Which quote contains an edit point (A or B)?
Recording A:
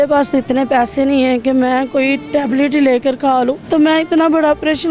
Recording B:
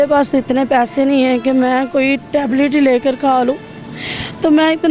A